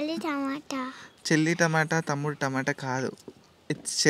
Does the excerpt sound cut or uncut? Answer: uncut